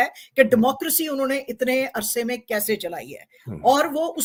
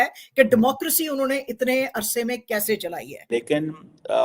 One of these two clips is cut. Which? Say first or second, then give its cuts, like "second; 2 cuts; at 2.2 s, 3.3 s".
second; 1 cut; at 3.2 s